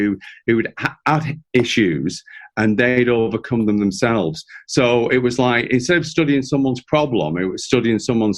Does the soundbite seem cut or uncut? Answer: uncut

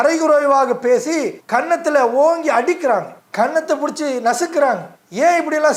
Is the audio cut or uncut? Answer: uncut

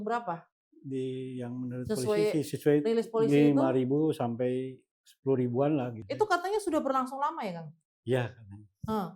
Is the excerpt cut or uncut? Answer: cut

